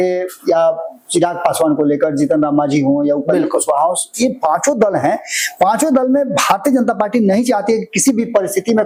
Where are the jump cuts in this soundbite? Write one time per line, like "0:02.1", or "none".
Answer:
none